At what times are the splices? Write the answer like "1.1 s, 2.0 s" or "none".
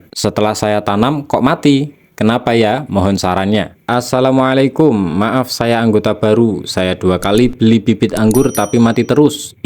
3.9 s